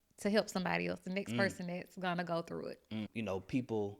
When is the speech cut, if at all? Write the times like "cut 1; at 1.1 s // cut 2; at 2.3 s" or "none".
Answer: cut 1; at 3.1 s